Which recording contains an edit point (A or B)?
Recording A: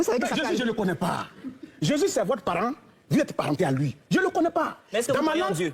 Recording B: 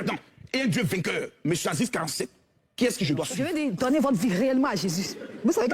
B